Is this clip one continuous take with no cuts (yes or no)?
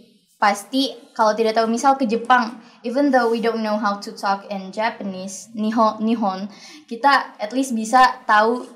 yes